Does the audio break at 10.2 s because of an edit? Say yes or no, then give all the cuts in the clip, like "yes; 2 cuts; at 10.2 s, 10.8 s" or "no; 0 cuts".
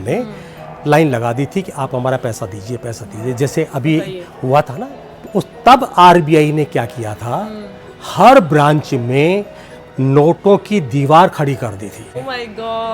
no; 2 cuts; at 4.8 s, 12.2 s